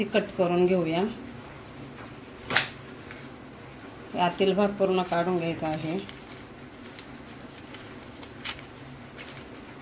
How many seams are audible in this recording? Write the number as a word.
zero